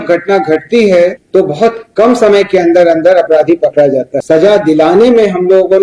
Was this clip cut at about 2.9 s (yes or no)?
no